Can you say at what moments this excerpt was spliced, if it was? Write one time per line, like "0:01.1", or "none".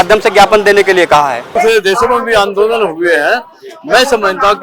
0:01.6